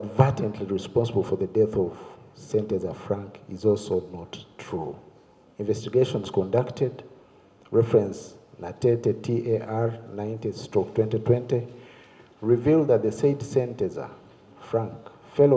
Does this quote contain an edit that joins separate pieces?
no; 0 cuts

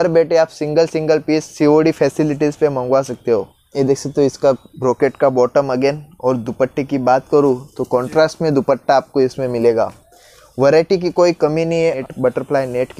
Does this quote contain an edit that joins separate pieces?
yes; 2 cuts; at 3.6 s, 12.0 s

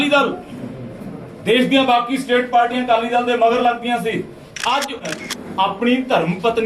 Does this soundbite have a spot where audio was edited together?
yes; 1 cut; at 5.1 s

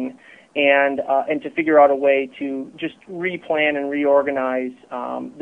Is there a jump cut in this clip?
no; 0 cuts

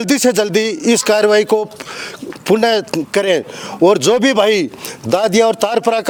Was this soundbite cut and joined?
no; 0 cuts

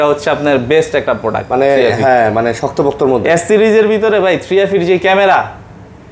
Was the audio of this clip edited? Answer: no; 0 cuts

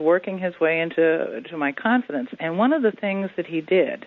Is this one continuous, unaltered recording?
no; 1 cut; at 0.9 s

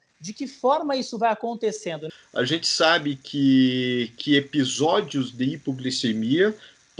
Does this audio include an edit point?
yes; 1 cut; at 2.1 s

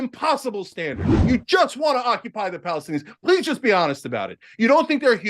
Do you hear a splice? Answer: yes; 1 cut; at 1.1 s

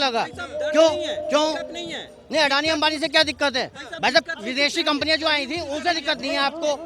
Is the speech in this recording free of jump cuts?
yes; 0 cuts

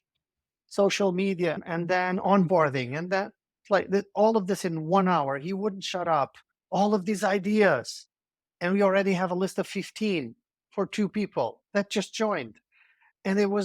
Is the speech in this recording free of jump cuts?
yes; 0 cuts

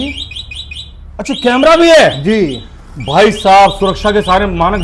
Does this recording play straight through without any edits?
yes; 0 cuts

